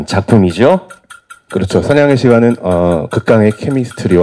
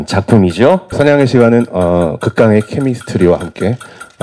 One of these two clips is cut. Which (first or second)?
second